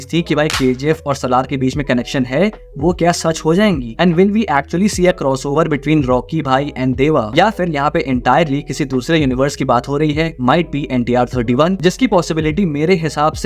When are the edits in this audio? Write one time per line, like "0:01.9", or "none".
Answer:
none

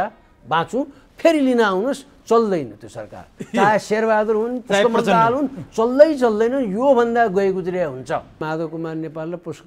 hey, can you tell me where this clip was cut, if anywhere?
0:08.4

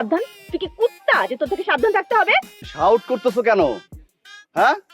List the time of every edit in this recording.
0:02.6

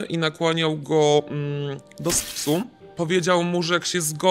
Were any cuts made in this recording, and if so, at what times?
none

